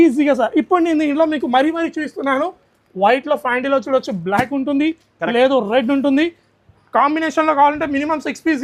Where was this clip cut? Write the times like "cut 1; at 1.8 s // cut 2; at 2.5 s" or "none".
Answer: none

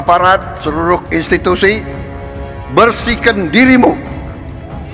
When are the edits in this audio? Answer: cut 1; at 1.0 s

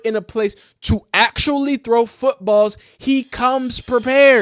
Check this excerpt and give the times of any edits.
none

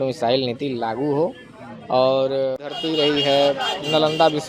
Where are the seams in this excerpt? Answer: none

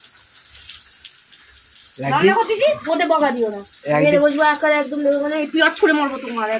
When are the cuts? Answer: none

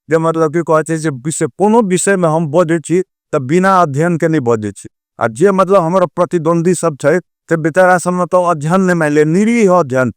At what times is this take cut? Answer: none

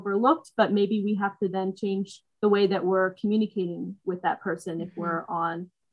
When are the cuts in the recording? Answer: none

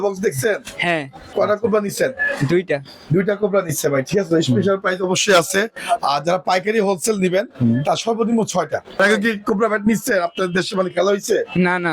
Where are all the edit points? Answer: cut 1; at 1.2 s // cut 2; at 9.0 s

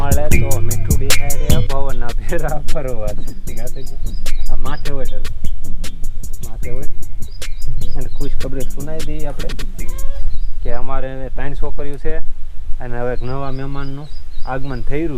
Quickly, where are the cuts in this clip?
cut 1; at 10.1 s

